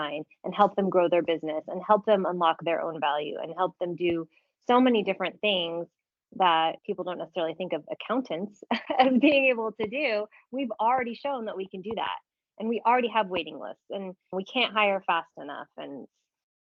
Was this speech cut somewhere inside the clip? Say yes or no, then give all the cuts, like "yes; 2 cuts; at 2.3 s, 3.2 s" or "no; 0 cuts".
no; 0 cuts